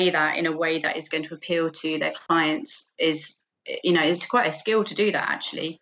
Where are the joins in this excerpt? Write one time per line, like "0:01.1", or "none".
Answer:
none